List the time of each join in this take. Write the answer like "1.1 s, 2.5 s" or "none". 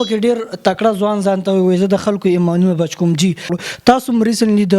3.5 s